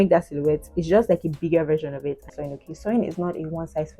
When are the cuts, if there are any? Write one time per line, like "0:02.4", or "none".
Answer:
0:02.3